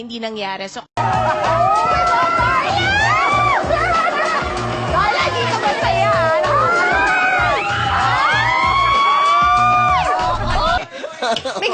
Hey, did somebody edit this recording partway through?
yes; 2 cuts; at 0.9 s, 10.8 s

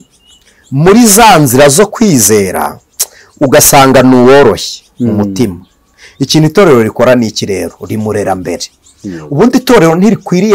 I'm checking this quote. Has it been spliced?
no; 0 cuts

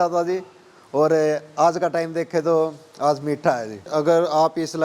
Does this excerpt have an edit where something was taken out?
yes; 1 cut; at 3.9 s

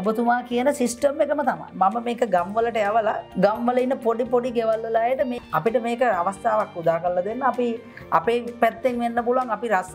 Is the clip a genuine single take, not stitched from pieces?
no; 2 cuts; at 3.2 s, 5.3 s

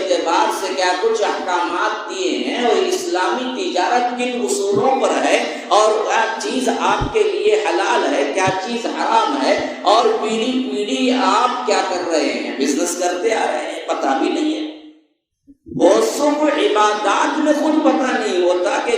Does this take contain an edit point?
no; 0 cuts

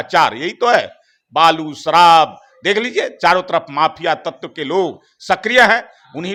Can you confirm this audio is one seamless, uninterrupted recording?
yes; 0 cuts

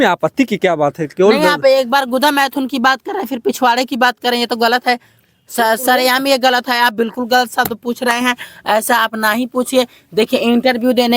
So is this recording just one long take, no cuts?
yes; 0 cuts

